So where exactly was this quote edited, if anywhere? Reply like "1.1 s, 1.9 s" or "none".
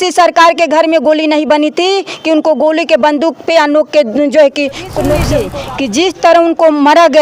5.4 s